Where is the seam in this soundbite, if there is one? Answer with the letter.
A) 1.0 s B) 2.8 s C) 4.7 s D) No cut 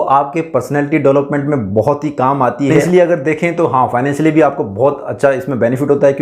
B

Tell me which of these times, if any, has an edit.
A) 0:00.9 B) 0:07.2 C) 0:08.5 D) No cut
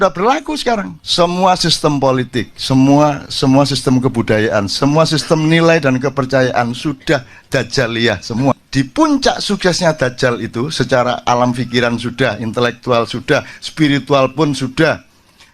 C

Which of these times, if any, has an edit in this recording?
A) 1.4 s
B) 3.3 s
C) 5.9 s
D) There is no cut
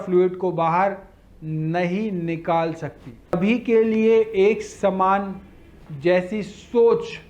B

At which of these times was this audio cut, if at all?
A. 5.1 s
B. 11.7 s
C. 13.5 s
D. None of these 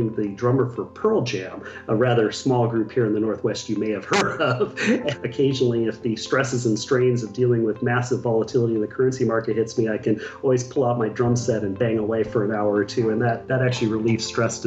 A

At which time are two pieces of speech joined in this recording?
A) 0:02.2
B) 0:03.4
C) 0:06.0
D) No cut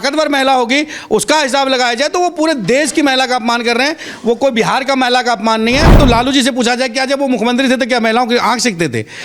C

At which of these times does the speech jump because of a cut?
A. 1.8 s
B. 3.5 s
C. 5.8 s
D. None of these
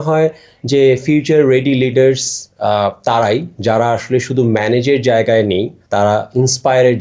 C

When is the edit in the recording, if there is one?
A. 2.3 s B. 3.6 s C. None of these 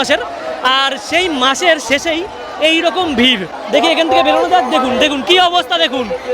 B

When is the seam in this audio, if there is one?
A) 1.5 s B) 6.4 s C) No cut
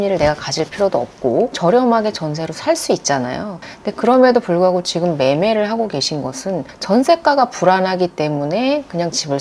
A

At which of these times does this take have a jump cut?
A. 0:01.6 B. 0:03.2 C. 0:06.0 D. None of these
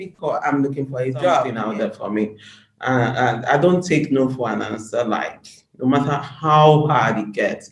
A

